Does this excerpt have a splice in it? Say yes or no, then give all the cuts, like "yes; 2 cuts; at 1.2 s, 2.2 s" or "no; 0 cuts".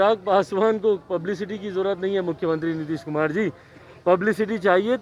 no; 0 cuts